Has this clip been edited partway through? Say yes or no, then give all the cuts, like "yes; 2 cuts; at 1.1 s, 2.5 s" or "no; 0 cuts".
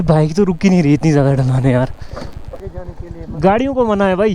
yes; 1 cut; at 2.6 s